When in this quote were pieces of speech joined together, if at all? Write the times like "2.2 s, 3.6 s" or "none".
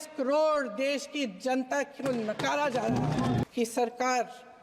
3.4 s